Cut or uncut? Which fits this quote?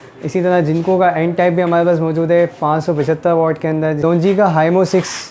cut